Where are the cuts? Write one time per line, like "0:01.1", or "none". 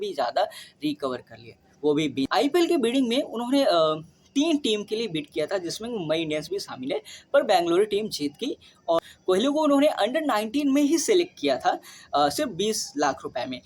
0:02.3
0:09.0